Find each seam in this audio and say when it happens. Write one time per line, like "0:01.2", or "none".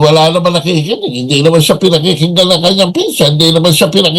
none